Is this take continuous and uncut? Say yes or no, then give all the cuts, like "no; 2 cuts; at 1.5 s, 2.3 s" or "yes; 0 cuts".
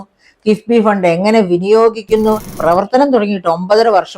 no; 1 cut; at 2.5 s